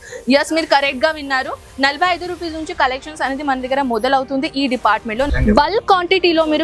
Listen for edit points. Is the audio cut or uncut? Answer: cut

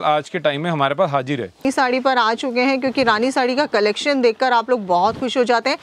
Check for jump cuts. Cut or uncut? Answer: cut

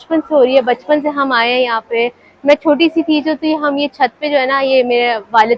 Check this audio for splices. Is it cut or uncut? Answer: uncut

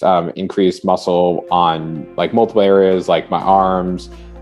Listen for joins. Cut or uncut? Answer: uncut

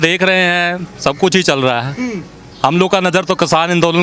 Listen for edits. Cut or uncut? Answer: uncut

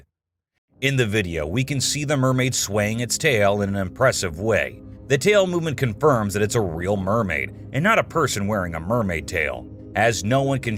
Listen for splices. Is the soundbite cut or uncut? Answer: uncut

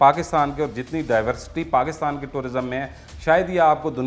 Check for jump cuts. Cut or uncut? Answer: uncut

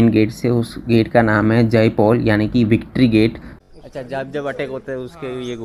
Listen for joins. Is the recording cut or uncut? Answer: cut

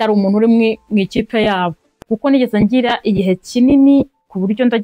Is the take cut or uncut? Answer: cut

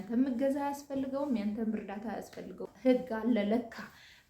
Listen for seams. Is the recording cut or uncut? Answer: cut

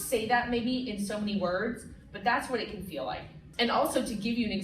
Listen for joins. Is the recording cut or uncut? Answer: cut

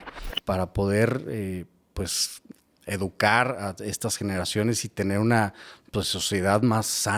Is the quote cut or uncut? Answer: uncut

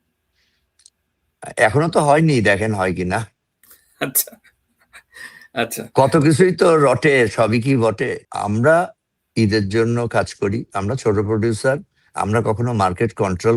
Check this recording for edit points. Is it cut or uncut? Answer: cut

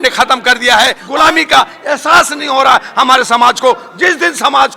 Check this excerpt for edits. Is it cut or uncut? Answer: cut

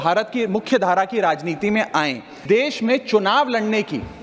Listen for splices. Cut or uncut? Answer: cut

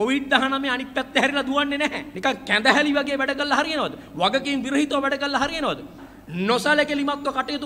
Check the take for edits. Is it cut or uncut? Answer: cut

